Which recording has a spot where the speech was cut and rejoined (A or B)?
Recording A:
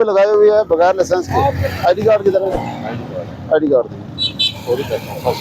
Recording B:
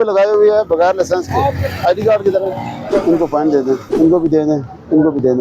B